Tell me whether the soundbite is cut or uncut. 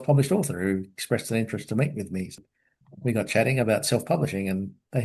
cut